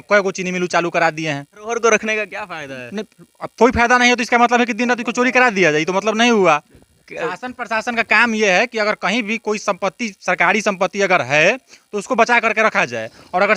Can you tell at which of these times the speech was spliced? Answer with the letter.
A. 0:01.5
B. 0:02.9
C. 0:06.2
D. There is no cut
A